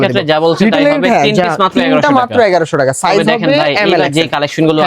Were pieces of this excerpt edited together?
no; 0 cuts

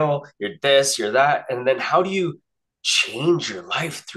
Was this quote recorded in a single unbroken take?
yes; 0 cuts

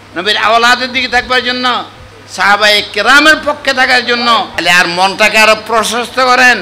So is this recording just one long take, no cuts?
no; 1 cut; at 4.5 s

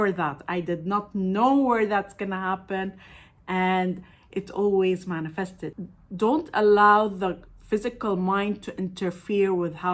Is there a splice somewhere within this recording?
yes; 1 cut; at 5.7 s

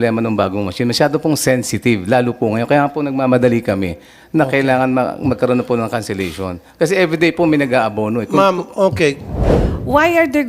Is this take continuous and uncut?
no; 1 cut; at 9.3 s

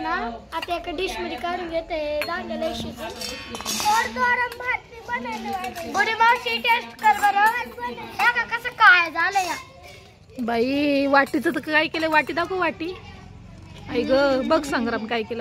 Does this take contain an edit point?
no; 0 cuts

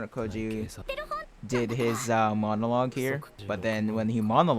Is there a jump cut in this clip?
yes; 1 cut; at 3.3 s

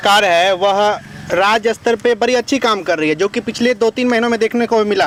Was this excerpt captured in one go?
yes; 0 cuts

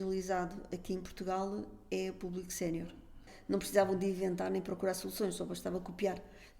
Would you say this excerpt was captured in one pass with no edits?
no; 1 cut; at 3.3 s

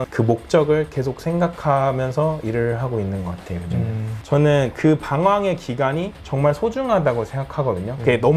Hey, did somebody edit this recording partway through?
yes; 1 cut; at 4.2 s

